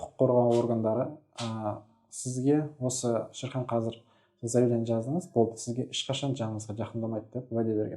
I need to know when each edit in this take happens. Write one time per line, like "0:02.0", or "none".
none